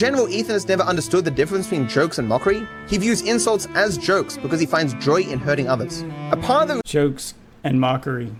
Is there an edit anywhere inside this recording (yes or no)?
no